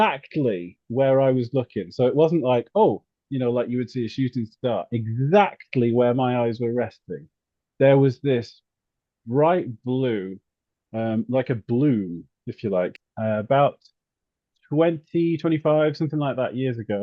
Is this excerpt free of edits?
no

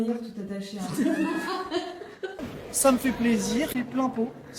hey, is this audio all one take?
no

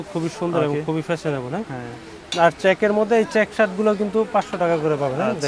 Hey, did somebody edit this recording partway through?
no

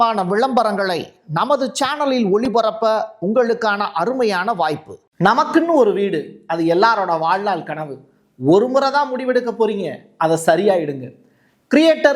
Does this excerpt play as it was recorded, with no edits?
no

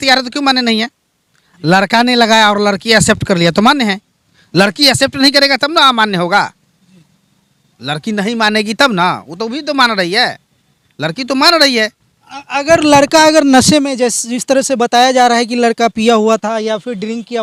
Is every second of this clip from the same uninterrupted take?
yes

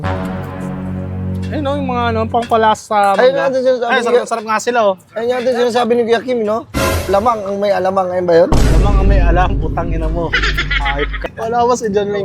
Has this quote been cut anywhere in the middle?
yes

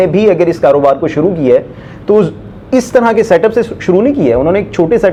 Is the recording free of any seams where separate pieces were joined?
yes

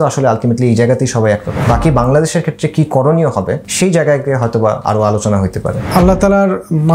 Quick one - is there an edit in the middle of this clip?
yes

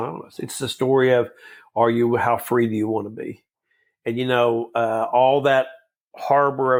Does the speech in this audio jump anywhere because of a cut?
no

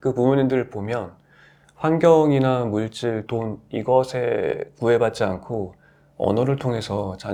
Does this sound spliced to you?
no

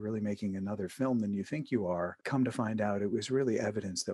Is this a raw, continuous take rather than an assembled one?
no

